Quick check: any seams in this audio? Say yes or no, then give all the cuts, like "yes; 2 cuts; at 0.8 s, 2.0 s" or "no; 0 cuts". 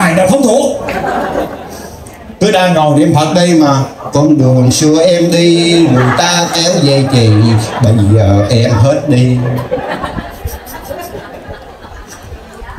no; 0 cuts